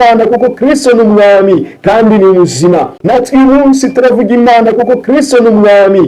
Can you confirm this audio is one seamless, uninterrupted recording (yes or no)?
no